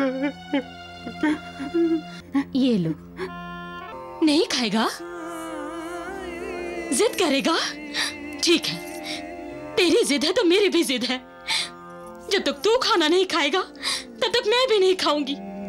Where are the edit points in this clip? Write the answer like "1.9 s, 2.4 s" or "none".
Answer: 2.2 s, 3.7 s